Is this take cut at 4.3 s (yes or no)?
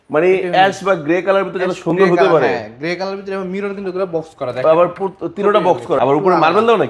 no